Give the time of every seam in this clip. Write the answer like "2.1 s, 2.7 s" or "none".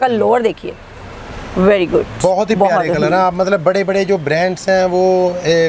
none